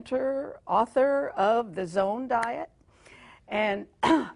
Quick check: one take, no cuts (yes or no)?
no